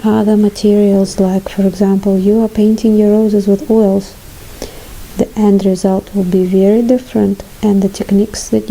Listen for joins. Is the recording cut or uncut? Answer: uncut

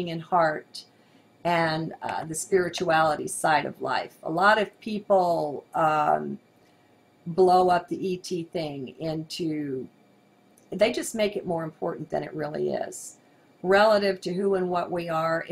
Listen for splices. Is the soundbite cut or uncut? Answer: uncut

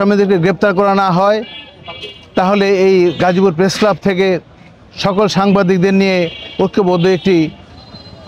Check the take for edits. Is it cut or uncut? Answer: uncut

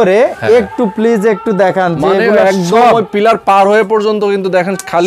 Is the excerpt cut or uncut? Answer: uncut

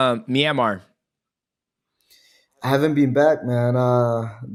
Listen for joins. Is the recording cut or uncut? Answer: uncut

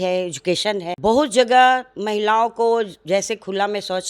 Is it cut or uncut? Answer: uncut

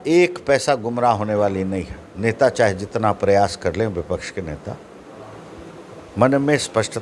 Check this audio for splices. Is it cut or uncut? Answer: uncut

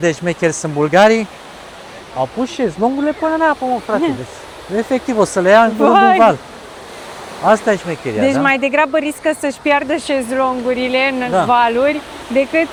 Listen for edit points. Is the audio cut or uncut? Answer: uncut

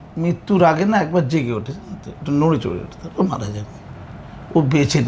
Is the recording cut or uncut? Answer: uncut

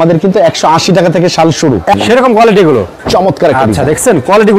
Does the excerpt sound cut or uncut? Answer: cut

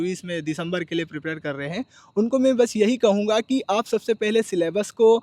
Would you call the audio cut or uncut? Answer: uncut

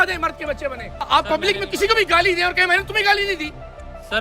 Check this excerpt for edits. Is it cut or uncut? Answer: cut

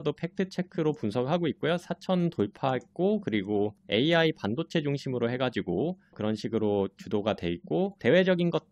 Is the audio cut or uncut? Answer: uncut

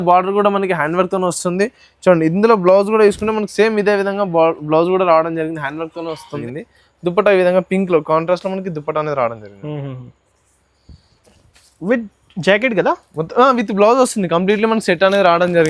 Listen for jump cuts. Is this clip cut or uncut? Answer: cut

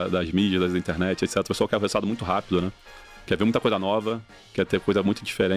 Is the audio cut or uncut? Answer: uncut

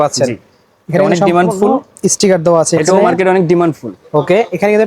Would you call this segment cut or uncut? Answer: cut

